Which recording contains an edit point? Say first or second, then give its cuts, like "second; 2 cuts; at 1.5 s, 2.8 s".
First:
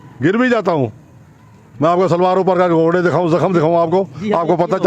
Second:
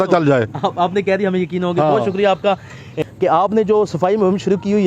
second; 1 cut; at 2.9 s